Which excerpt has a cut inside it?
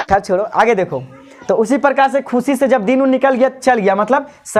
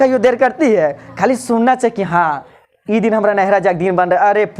second; 1 cut; at 1.0 s

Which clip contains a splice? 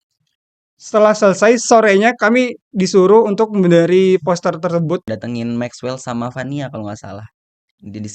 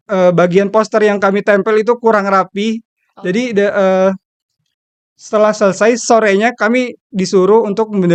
first; 1 cut; at 5.1 s

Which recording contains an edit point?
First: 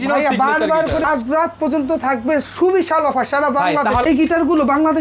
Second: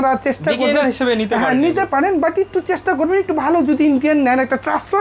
first; 2 cuts; at 1.0 s, 4.0 s

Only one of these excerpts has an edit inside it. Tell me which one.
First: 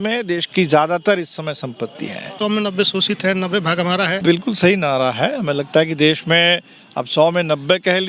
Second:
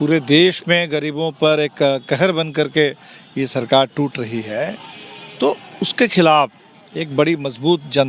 first; 2 cuts; at 2.4 s, 4.2 s

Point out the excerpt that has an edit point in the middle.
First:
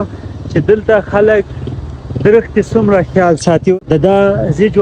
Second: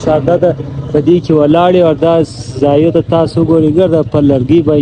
first; 1 cut; at 3.7 s

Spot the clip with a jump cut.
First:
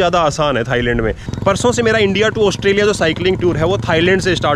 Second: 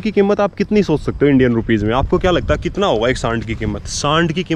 first; 1 cut; at 1.3 s

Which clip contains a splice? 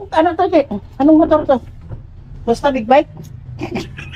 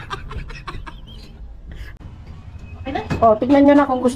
second; 1 cut; at 2.0 s

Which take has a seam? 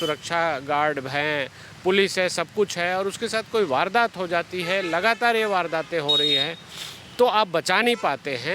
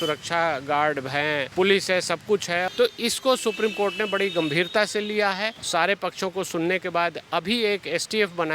second; 3 cuts; at 1.5 s, 2.7 s, 5.6 s

